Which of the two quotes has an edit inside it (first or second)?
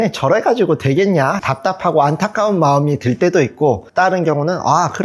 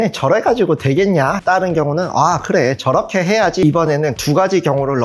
second